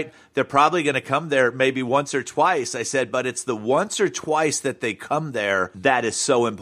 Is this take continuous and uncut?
no; 1 cut; at 5.7 s

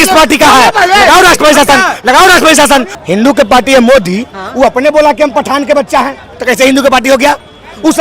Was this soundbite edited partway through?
yes; 1 cut; at 2.9 s

